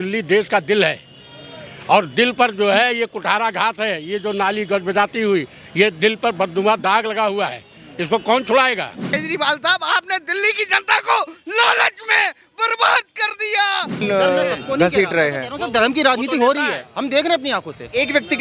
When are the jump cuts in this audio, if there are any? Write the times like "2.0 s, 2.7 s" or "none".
9.1 s, 14.0 s